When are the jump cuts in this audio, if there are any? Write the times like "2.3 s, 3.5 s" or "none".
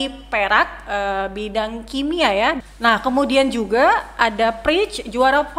2.6 s

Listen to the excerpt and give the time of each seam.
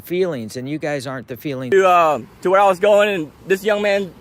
1.6 s

